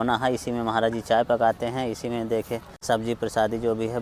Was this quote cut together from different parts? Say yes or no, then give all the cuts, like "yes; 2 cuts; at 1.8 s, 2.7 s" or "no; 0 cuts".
yes; 1 cut; at 2.7 s